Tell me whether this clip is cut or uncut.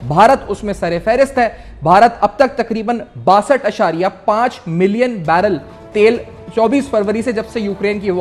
uncut